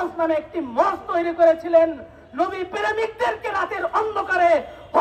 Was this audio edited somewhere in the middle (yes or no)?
no